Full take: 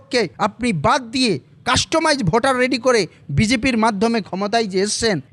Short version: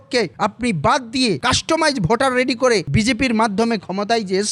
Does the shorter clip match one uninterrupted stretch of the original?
no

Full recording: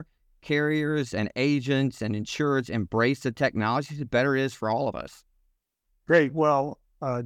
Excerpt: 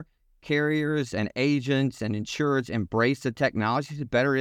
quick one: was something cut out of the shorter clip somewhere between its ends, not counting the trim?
no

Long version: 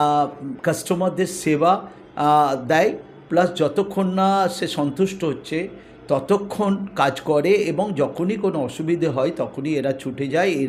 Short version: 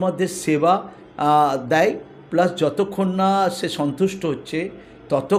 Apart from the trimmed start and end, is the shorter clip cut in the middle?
no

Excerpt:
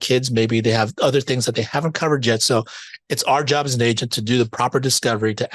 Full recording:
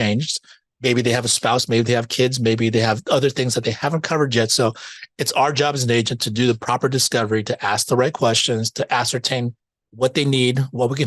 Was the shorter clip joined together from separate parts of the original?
no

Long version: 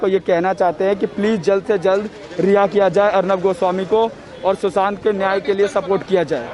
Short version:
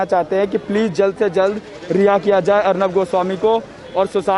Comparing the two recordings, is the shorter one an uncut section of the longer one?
yes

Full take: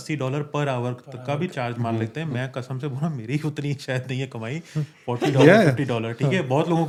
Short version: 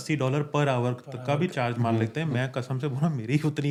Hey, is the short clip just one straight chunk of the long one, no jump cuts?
yes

